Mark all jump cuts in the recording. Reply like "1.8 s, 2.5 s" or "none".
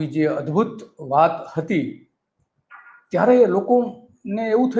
none